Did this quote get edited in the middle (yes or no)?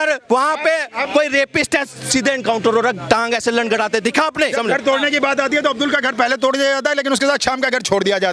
yes